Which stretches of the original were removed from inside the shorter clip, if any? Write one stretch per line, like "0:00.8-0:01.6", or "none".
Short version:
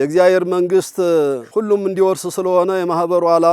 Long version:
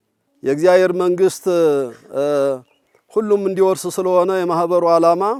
0:01.9-0:03.0

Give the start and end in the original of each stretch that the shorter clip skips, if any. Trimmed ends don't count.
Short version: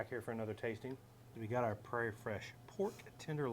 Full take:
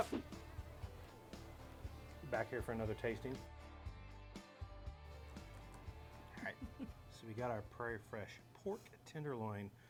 0:03.6-0:07.1

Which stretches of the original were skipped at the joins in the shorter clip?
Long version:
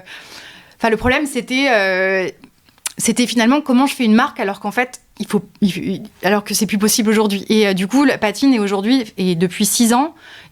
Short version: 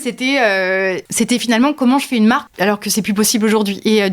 0:02.3-0:02.9
0:04.3-0:06.1

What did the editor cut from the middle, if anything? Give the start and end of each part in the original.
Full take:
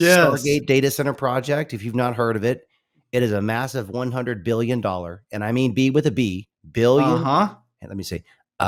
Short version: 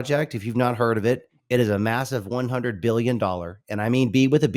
0:02.7-0:03.0

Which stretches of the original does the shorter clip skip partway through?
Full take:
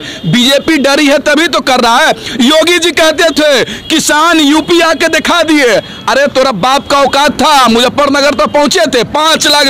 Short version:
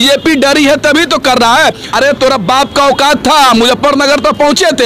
0:02.2-0:06.0

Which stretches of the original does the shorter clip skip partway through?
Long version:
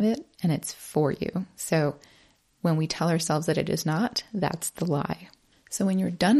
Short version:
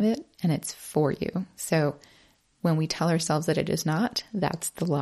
none

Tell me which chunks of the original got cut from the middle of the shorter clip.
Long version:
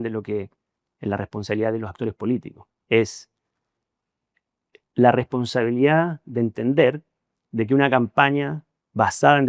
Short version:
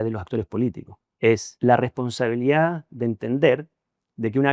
0:03.2-0:04.8

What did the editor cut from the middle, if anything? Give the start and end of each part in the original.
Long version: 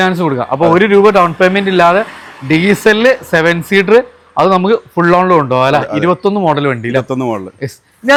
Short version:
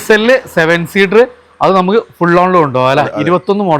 none

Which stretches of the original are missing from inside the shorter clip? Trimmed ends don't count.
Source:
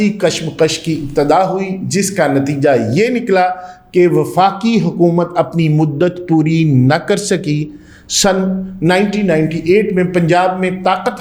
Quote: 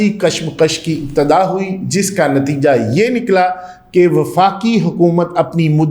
none

